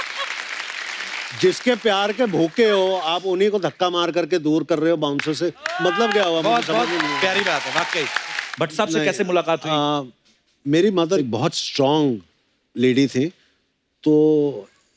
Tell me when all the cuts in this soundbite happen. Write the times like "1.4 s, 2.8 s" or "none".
8.4 s